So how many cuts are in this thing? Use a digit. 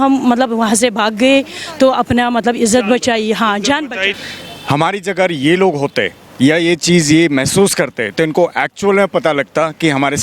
1